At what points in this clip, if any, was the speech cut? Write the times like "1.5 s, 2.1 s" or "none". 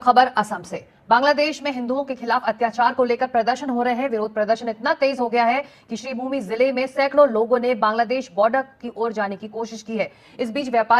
none

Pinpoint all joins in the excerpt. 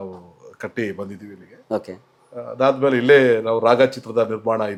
none

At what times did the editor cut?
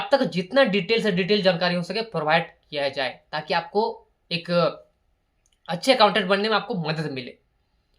none

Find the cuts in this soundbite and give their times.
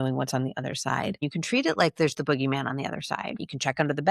1.2 s, 3.4 s

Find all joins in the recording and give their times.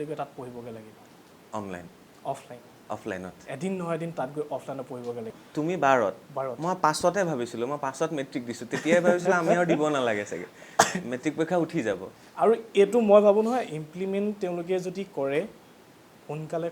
5.3 s

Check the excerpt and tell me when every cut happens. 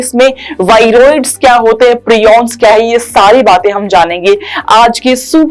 none

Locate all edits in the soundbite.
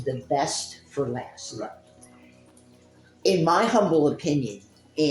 none

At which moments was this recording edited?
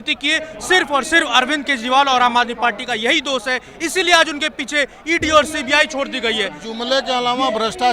6.6 s

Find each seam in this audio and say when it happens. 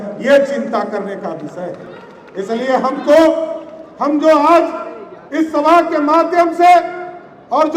none

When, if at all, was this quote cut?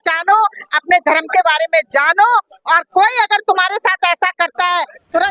none

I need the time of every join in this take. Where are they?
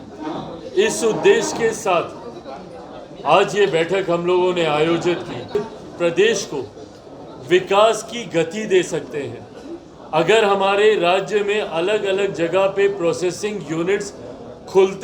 5.5 s

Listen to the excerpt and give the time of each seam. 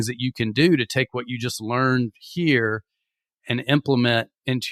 none

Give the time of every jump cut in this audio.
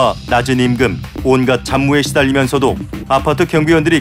1.1 s, 2.9 s

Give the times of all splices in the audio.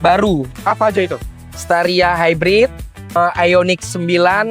3.2 s

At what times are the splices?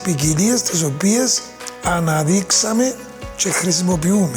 none

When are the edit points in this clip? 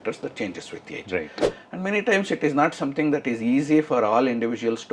1.4 s

